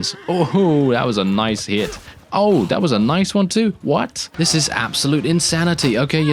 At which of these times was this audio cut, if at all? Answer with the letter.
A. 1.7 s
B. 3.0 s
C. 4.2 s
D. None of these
C